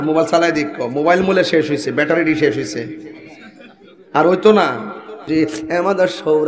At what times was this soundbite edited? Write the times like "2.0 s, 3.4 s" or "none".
5.2 s